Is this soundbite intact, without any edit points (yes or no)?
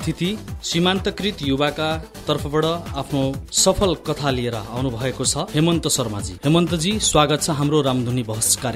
yes